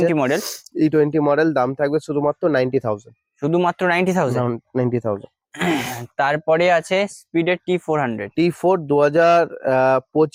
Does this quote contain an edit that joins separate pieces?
no; 0 cuts

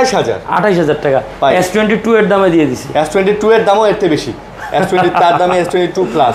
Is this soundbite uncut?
yes; 0 cuts

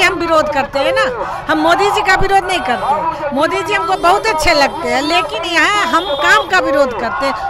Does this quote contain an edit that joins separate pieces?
no; 0 cuts

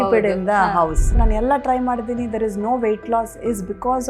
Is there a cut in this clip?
yes; 1 cut; at 1.2 s

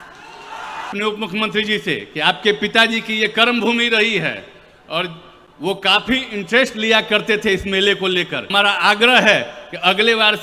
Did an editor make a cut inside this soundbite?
yes; 2 cuts; at 0.9 s, 8.5 s

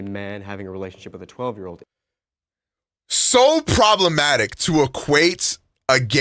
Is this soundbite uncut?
yes; 0 cuts

